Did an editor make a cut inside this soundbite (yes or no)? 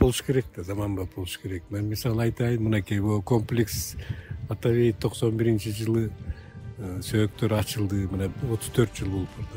no